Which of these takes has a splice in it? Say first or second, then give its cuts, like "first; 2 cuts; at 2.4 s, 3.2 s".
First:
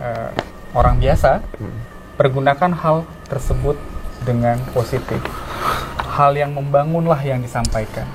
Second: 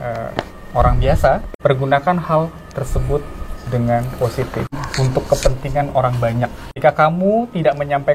second; 3 cuts; at 1.5 s, 4.8 s, 6.6 s